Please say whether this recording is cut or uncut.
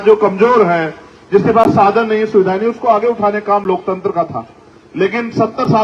uncut